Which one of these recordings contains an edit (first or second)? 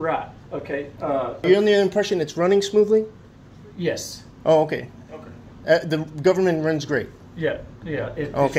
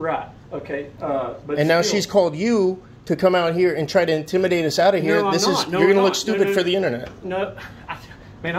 first